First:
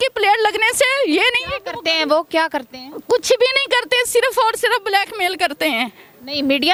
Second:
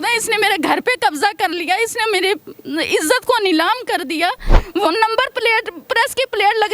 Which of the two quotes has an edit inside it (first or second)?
second